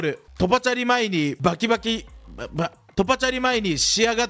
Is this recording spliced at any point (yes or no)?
yes